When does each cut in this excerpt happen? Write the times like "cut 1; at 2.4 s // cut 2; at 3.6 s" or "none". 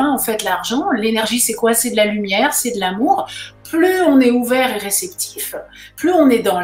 none